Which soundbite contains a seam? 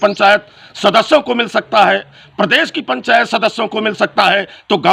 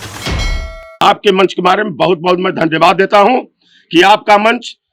second; 1 cut; at 1.0 s

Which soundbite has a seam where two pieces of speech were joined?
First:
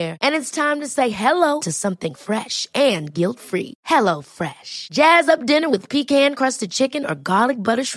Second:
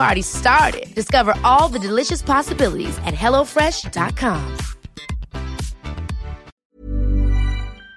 second; 1 cut; at 6.5 s

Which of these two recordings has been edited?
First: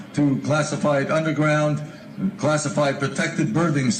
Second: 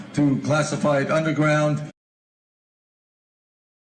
first; 1 cut; at 2.0 s

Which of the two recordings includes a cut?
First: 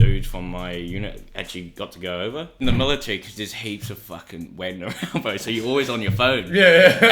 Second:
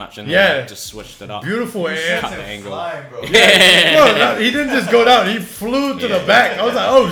first; 1 cut; at 2.6 s

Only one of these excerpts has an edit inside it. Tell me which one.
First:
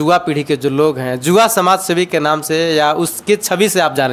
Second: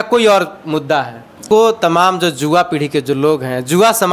second; 1 cut; at 1.4 s

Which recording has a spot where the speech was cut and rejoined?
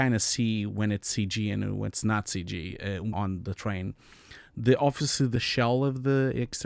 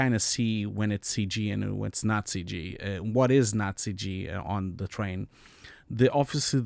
first; 2 cuts; at 3.1 s, 5.3 s

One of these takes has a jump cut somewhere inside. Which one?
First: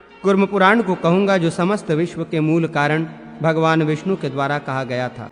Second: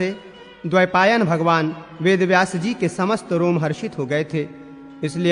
first; 1 cut; at 4.0 s

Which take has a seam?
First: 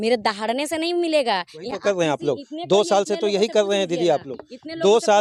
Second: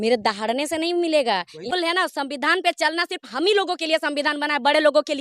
second; 1 cut; at 1.7 s

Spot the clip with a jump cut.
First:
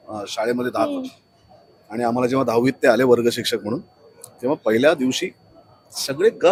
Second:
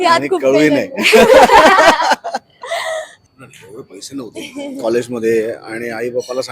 second; 1 cut; at 3.1 s

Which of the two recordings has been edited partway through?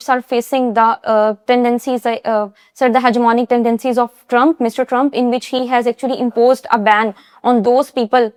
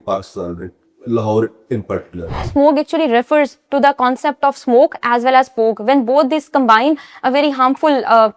second; 1 cut; at 2.5 s

